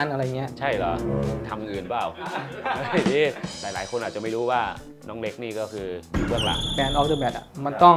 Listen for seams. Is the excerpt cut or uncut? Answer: cut